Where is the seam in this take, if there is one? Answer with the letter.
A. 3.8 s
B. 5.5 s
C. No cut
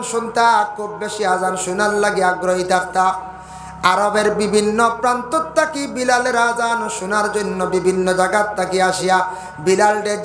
C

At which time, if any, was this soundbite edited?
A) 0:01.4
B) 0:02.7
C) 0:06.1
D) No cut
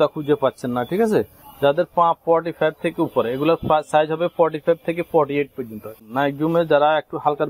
C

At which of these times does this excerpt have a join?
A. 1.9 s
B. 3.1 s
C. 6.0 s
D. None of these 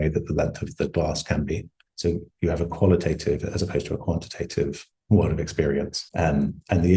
C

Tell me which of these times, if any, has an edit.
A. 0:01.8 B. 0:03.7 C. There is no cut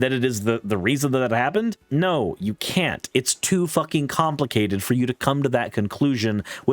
A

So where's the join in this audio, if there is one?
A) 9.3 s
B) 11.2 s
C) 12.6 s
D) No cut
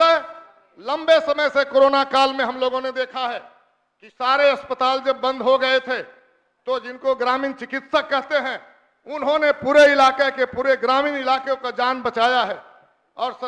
D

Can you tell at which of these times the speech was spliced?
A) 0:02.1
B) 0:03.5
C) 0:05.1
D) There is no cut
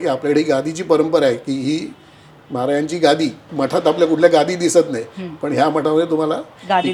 B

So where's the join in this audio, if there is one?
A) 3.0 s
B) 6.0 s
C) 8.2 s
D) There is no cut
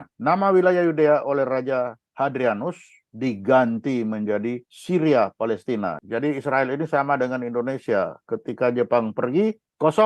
B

